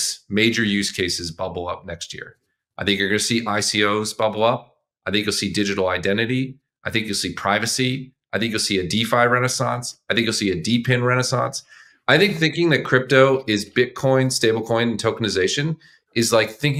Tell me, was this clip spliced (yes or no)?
no